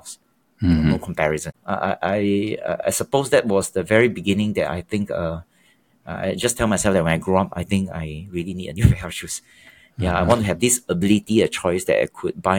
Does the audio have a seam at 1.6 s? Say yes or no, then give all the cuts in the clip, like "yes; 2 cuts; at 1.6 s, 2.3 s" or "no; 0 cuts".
yes; 1 cut; at 1.6 s